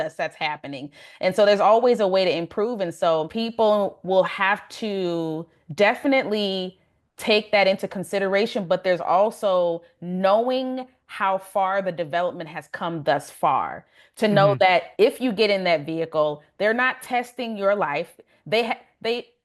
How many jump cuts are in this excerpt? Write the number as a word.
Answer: one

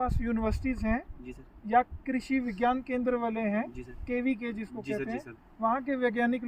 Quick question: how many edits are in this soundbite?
zero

